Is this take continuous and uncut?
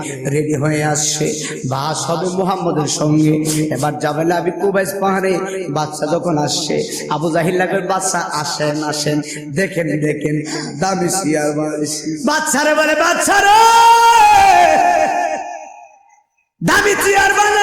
no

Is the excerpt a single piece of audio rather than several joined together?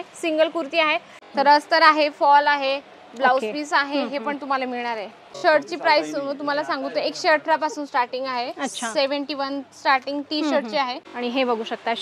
no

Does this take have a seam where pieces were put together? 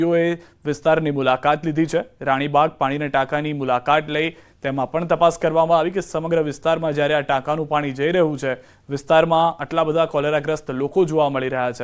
yes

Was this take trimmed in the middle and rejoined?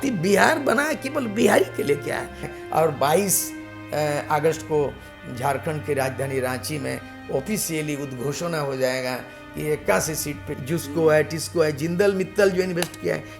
yes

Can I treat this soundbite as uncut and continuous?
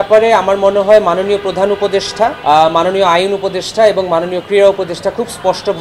no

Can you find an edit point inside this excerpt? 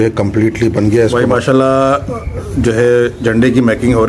yes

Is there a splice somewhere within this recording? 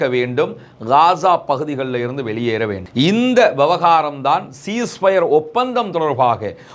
no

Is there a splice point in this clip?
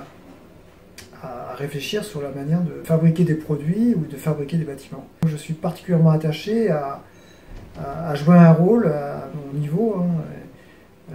yes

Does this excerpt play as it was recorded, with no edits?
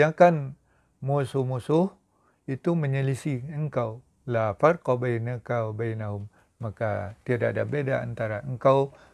yes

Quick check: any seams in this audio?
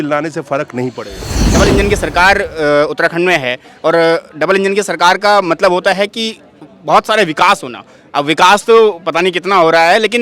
yes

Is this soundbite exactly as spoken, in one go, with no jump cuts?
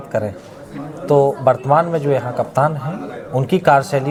yes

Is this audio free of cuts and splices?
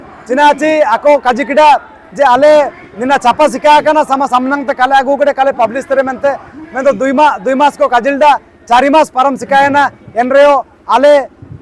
yes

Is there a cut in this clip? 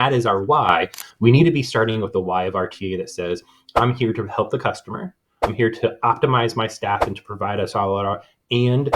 yes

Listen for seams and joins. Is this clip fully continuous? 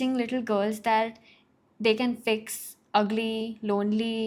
yes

